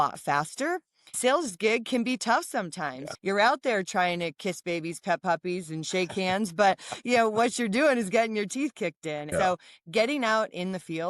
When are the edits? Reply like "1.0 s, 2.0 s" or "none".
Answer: 1.2 s, 3.1 s, 9.3 s